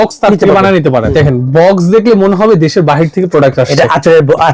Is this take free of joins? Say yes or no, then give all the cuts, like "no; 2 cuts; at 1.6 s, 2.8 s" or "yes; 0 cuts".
no; 1 cut; at 1.1 s